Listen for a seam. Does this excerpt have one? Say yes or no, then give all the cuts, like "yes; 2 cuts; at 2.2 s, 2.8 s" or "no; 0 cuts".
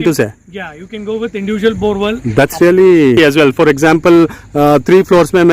yes; 1 cut; at 3.2 s